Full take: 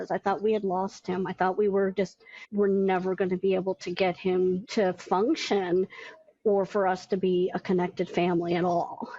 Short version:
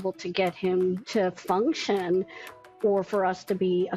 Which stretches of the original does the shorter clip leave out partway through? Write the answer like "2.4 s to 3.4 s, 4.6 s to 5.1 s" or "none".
none